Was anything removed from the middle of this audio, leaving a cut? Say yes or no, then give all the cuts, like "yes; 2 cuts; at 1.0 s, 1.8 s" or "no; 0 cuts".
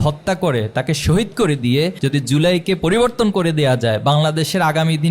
yes; 1 cut; at 2.0 s